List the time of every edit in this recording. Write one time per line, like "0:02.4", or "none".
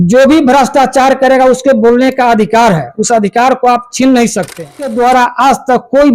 0:04.9